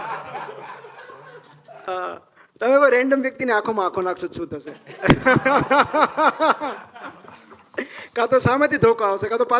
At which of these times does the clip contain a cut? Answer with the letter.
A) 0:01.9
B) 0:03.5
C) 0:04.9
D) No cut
A